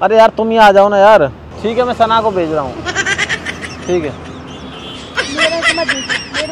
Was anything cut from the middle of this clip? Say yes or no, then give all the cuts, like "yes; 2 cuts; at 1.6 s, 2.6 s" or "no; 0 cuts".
yes; 1 cut; at 1.5 s